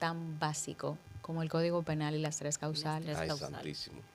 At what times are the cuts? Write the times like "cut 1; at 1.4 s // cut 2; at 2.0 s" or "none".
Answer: cut 1; at 1.1 s